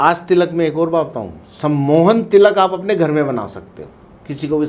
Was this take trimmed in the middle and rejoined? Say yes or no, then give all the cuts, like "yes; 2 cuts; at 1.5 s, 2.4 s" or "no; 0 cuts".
no; 0 cuts